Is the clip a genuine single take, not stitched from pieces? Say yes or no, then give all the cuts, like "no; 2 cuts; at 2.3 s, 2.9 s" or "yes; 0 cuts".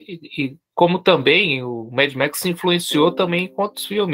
yes; 0 cuts